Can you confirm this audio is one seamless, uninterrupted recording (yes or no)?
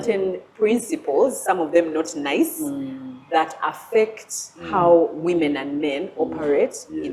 yes